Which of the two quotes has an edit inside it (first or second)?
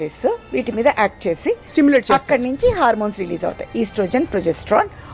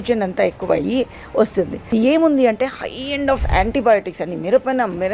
second